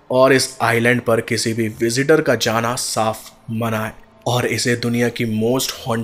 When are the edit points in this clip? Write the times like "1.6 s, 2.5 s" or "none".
none